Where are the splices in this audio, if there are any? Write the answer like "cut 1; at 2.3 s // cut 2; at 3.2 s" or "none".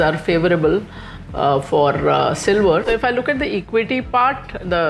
cut 1; at 2.8 s